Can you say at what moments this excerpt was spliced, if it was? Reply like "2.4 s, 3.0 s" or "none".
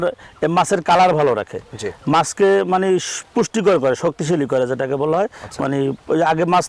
none